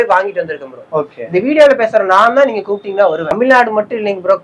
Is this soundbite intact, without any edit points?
no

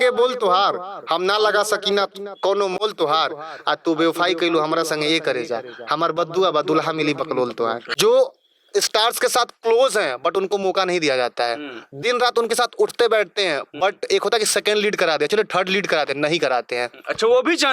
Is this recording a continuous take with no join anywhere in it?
no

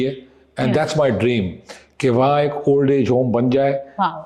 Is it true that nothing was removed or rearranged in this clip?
yes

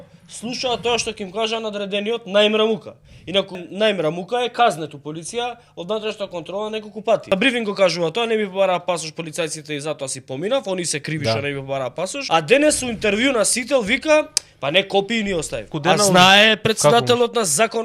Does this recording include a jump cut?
yes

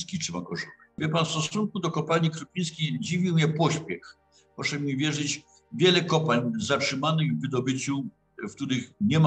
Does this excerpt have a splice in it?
yes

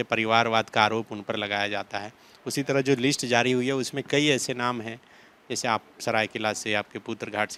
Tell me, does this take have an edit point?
no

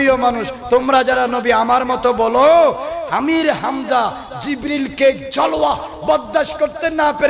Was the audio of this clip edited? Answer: no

